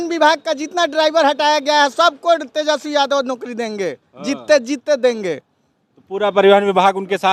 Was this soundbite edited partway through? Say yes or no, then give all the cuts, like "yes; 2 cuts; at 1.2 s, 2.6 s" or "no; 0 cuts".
no; 0 cuts